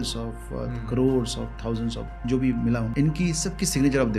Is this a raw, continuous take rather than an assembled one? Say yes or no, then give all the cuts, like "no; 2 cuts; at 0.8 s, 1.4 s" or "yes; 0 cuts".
no; 1 cut; at 2.9 s